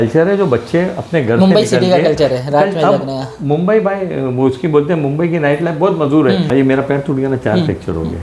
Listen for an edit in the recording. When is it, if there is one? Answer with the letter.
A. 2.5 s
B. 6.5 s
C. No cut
B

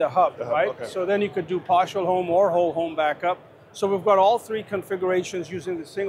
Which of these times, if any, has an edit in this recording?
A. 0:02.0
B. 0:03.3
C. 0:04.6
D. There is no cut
D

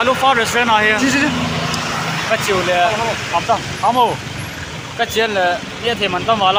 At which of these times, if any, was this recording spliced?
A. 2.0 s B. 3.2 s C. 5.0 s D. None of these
D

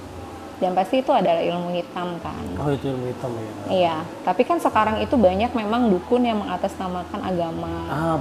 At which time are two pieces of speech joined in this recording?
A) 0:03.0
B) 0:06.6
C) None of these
C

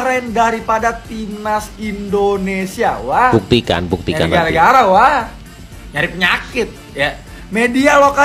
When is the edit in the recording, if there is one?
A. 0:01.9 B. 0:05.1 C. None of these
C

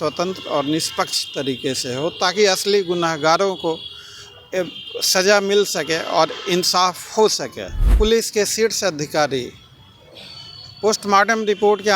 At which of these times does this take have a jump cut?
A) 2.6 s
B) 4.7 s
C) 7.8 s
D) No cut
C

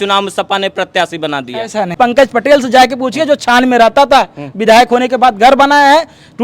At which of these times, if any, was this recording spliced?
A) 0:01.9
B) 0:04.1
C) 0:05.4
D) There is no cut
A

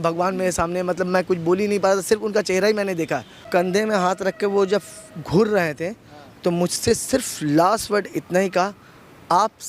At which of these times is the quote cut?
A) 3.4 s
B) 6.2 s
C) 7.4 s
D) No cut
A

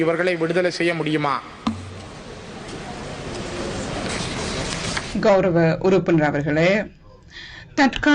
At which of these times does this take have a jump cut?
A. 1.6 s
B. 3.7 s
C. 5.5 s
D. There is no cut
D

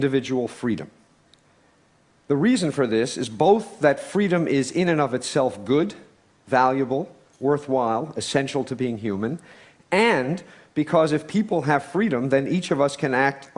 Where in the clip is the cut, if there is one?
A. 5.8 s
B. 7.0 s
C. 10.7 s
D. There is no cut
A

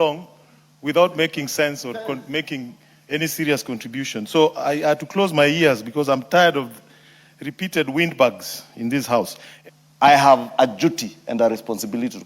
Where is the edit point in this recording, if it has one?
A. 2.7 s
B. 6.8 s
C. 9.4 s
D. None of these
C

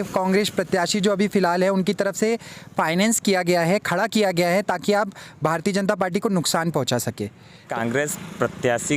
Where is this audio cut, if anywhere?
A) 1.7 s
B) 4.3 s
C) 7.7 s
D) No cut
C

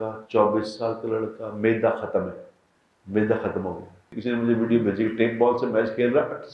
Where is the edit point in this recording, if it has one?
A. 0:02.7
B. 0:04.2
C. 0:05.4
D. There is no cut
B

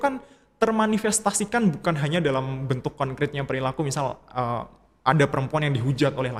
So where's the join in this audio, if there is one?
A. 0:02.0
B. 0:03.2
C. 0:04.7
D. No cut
D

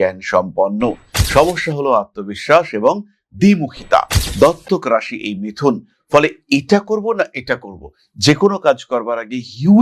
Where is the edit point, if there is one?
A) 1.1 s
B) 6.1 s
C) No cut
A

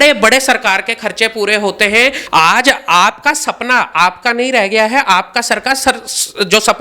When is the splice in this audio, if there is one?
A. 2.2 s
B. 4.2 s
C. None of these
A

